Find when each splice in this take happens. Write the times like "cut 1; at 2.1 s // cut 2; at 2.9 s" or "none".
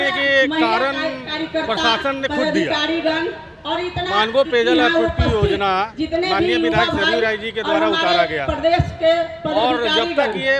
none

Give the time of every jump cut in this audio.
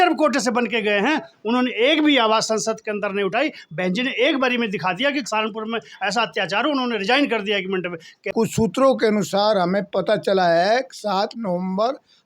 cut 1; at 8.3 s

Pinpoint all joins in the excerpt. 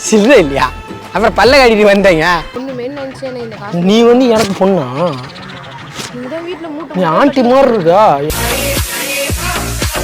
cut 1; at 2.6 s

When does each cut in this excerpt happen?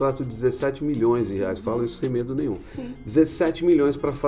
none

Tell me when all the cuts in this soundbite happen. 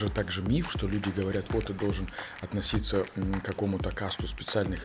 none

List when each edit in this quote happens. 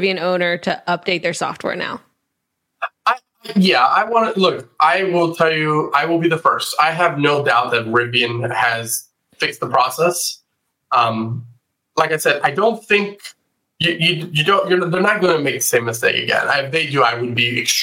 none

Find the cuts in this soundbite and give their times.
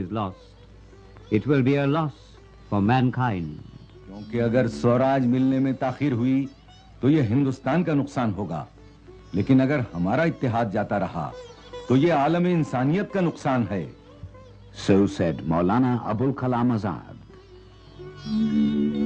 cut 1; at 12.6 s

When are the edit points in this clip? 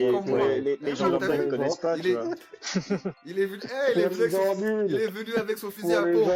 none

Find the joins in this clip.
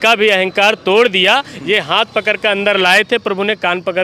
none

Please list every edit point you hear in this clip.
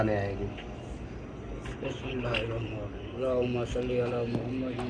cut 1; at 3.1 s

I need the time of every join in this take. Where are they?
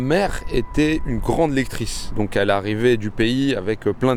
none

